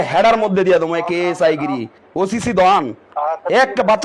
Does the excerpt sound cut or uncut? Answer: cut